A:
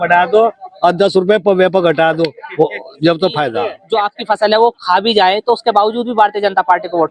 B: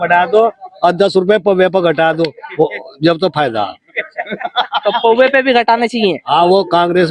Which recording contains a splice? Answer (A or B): A